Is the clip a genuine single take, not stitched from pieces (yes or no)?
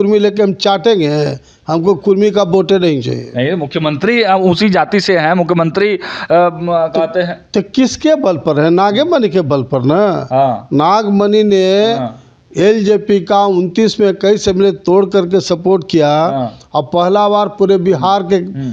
yes